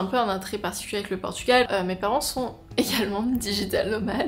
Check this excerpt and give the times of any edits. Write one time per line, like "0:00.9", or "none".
0:01.7

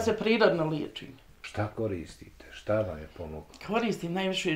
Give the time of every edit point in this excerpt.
0:01.4

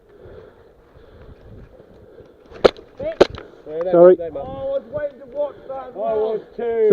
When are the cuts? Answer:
0:02.5

